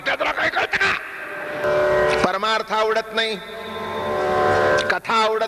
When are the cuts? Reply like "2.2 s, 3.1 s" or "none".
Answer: 1.6 s

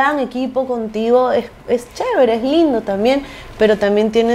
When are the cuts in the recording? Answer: none

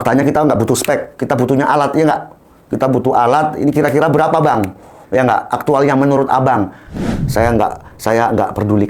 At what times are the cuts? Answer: 6.8 s

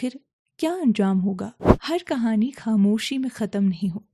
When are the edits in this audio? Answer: 1.6 s

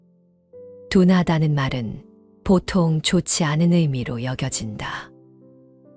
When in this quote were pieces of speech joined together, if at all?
0.9 s, 5.0 s

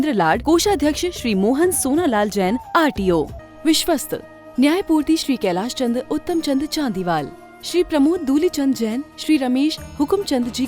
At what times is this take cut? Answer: 3.4 s

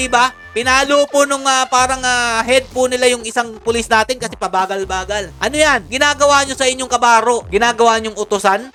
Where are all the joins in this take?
none

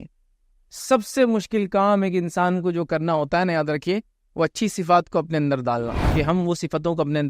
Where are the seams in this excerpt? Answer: 6.0 s

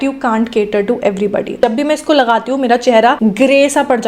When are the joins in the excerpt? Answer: 1.6 s, 3.2 s

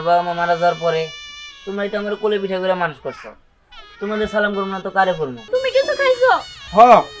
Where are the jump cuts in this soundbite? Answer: 5.4 s

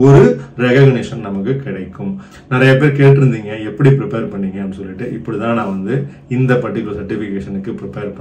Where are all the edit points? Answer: 2.3 s

